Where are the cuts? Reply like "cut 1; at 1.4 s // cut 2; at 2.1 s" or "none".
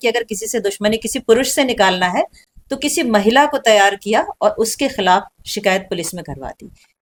none